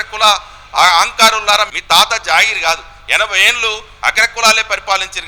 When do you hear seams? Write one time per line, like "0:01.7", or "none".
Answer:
0:01.7